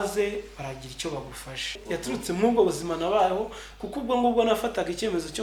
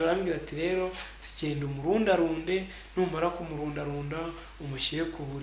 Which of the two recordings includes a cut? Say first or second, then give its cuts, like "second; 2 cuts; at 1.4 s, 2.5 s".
first; 1 cut; at 1.8 s